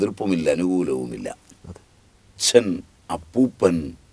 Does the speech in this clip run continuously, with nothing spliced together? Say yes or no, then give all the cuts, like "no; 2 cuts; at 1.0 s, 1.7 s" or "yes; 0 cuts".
no; 1 cut; at 2.4 s